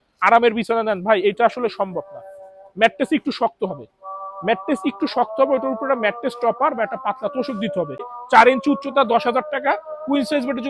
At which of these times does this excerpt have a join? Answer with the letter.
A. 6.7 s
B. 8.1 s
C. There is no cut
B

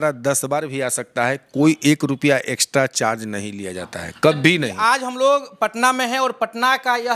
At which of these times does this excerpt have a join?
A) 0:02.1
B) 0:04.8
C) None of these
B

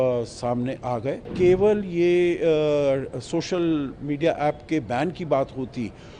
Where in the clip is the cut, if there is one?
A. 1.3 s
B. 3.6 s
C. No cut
A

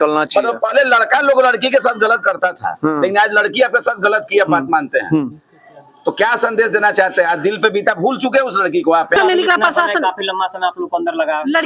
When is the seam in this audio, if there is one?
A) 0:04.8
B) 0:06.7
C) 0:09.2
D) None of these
C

